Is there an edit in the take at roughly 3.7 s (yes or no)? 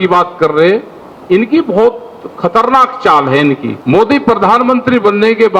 yes